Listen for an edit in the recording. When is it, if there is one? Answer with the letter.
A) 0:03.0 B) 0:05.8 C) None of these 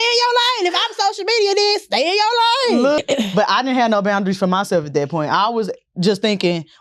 A